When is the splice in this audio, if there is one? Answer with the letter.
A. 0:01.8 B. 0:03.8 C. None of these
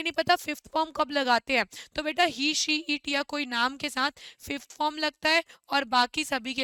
C